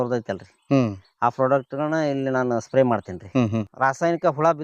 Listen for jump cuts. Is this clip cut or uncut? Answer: cut